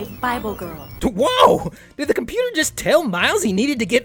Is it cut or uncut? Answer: uncut